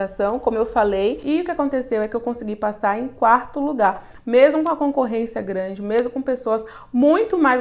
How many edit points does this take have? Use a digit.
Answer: 1